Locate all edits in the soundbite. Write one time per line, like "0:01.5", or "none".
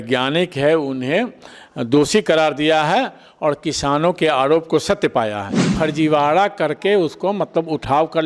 0:05.6